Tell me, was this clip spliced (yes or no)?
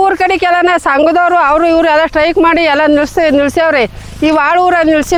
no